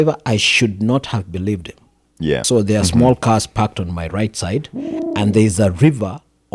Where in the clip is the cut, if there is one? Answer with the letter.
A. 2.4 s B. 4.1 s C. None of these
A